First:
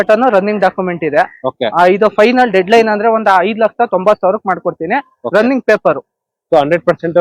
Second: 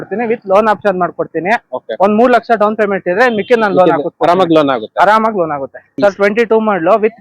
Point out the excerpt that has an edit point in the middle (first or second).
second